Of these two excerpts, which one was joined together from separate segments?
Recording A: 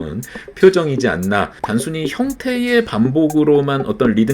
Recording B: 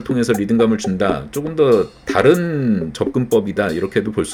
A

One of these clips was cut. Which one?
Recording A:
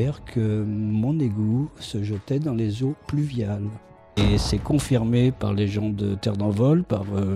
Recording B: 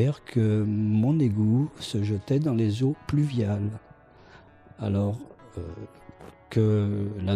A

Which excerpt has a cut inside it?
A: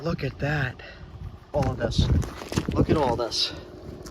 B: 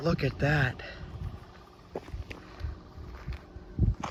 A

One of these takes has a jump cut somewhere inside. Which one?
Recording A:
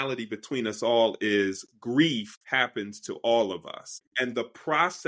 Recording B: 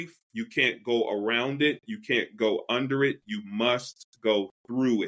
A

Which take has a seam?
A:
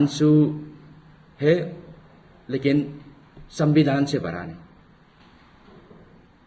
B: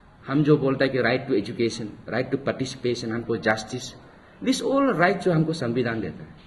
A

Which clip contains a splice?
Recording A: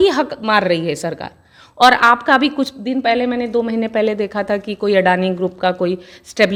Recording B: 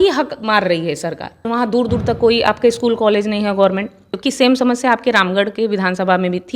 B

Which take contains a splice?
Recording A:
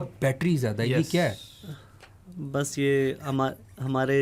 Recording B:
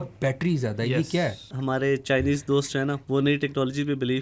B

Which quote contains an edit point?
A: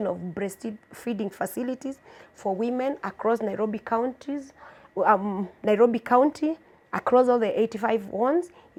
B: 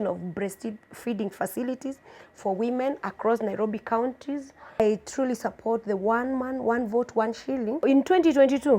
B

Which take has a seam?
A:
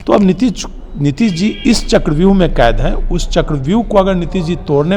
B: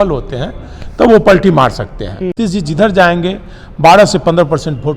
B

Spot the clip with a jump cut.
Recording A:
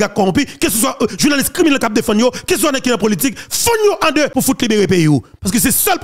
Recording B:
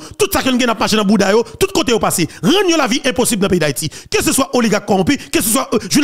A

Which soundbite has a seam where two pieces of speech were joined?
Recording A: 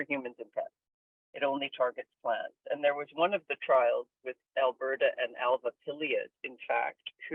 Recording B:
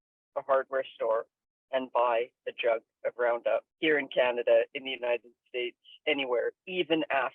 B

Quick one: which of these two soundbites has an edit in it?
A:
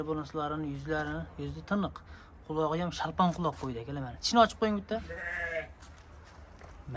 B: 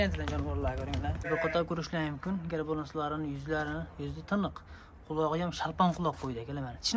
B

